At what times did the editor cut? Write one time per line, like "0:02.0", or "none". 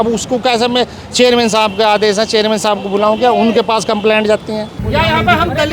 0:04.8

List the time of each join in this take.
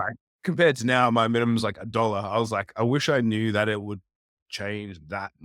none

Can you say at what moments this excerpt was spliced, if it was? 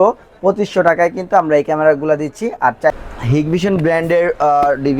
0:02.9

